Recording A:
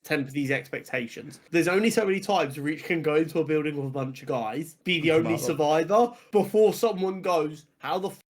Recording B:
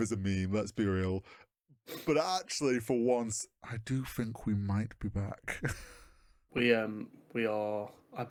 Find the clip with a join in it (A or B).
A